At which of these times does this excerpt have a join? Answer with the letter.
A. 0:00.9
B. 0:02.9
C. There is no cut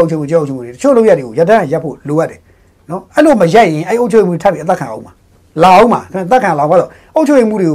C